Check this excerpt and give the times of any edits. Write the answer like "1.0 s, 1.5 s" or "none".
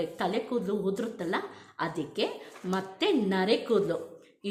none